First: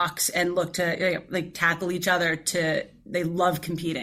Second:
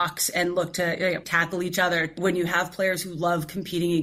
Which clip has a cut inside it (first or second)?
second